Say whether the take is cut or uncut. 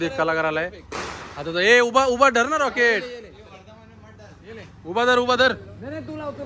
uncut